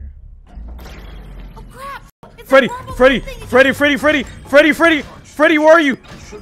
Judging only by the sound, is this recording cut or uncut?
cut